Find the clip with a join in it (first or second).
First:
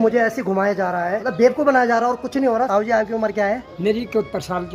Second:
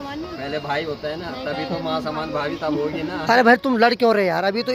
first